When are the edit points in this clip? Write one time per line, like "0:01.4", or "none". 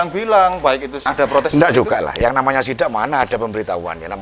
0:01.1